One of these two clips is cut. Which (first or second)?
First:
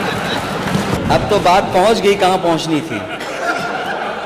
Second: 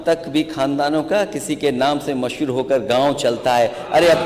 first